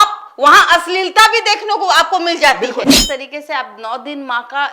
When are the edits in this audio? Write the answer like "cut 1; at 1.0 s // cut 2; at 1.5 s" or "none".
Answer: cut 1; at 3.0 s